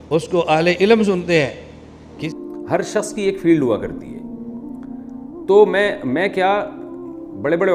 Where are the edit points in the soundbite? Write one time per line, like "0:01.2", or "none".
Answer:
0:02.2

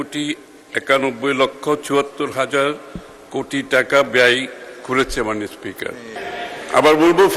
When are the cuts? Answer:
0:06.2

